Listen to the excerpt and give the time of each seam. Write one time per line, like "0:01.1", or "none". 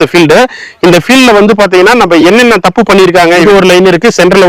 0:03.4